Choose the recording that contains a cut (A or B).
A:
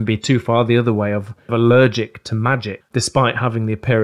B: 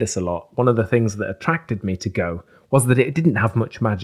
A